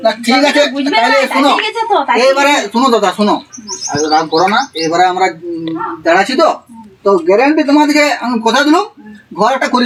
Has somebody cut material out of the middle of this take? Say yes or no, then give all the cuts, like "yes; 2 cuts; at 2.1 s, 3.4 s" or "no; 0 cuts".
no; 0 cuts